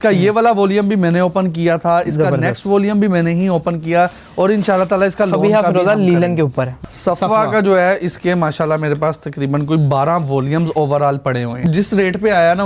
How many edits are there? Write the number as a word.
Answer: two